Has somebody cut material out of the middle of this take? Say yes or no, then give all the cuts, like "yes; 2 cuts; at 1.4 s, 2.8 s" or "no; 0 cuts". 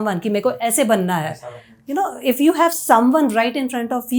no; 0 cuts